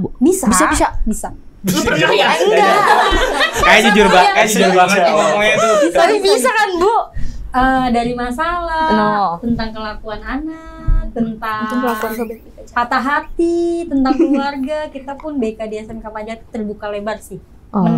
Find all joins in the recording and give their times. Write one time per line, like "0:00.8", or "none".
none